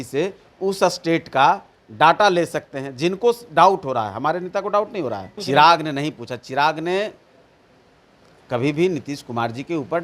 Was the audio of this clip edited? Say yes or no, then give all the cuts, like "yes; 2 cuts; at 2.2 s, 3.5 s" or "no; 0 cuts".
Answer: yes; 1 cut; at 5.4 s